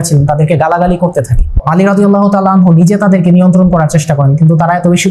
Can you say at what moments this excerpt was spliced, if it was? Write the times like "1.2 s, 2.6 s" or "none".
1.6 s